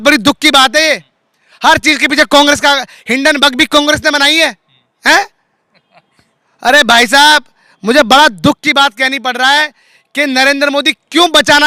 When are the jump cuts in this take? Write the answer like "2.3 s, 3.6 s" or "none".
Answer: none